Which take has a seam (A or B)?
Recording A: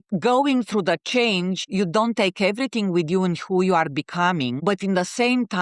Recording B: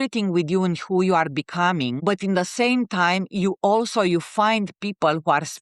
A